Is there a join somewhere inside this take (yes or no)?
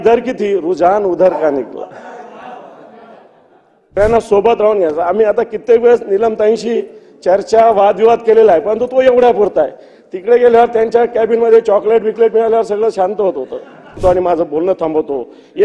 yes